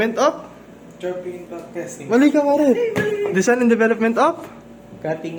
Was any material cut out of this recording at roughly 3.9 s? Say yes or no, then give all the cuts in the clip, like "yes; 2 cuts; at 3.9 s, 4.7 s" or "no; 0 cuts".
no; 0 cuts